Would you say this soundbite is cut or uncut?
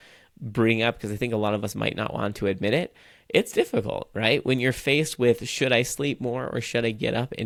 uncut